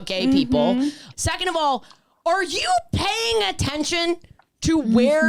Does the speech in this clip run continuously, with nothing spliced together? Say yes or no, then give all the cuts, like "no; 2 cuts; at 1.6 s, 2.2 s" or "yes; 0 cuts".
no; 1 cut; at 1.1 s